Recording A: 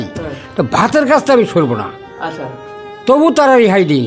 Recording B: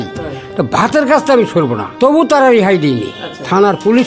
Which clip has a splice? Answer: B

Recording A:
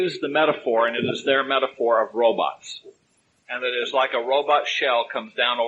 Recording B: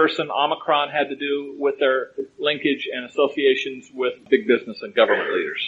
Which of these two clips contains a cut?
B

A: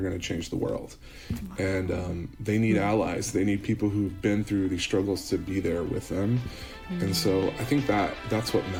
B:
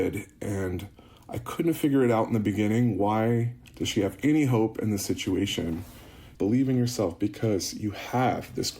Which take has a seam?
B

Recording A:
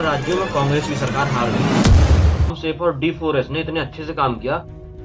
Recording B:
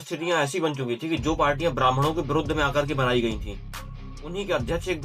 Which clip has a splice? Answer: A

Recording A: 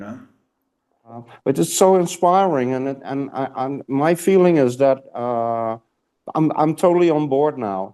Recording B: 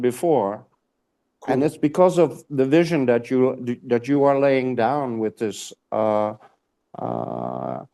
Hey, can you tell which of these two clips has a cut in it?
A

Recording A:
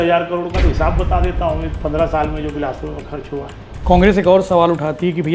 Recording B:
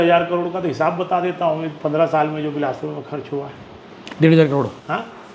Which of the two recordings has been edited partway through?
A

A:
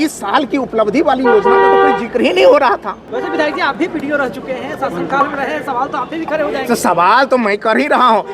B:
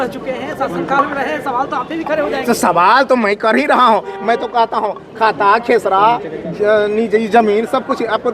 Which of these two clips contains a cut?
A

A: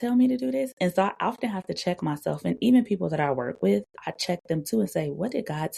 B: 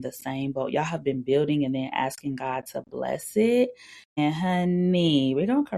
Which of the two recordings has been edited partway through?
B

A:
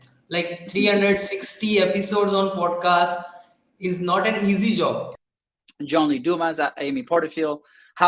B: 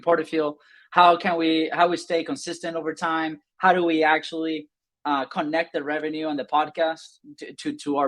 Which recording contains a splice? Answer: A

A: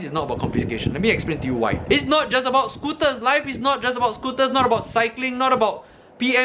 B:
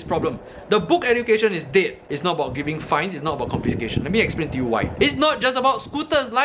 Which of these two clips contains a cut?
B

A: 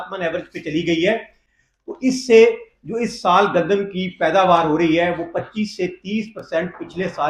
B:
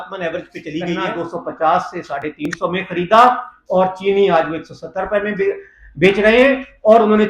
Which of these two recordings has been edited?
B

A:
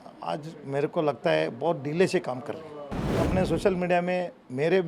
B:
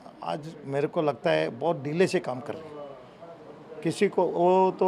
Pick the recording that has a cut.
A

